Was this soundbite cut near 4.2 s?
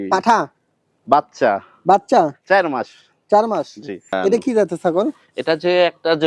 yes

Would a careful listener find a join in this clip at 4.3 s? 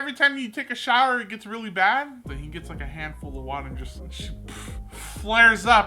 no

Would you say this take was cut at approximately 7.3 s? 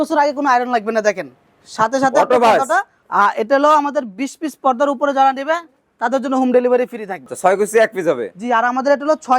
yes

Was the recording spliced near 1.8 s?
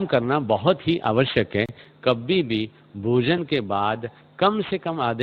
yes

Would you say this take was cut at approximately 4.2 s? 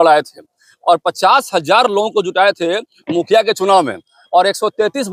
no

